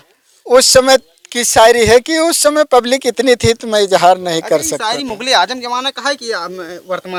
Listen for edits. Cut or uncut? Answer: uncut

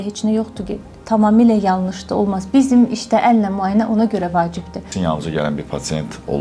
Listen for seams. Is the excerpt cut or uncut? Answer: cut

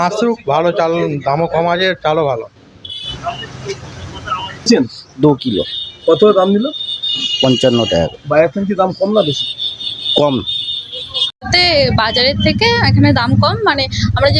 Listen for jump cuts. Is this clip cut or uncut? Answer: cut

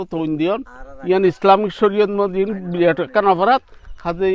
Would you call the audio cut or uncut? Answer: uncut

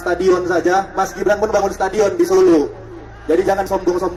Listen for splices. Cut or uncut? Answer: uncut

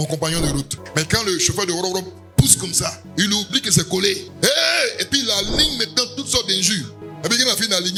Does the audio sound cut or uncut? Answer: uncut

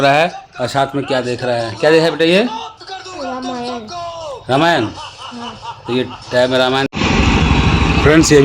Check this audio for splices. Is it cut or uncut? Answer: cut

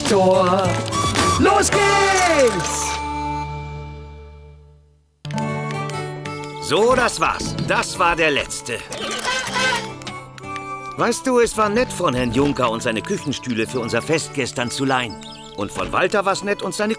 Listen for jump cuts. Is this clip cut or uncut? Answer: uncut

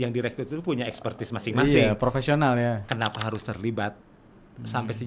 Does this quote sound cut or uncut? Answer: uncut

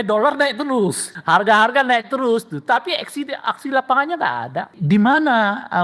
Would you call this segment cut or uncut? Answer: cut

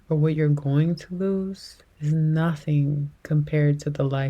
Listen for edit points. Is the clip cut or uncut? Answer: cut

